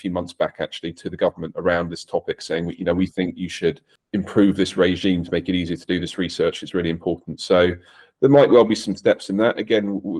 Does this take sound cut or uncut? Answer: cut